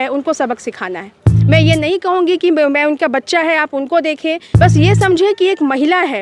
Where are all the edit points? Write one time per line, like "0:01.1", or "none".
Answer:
0:04.5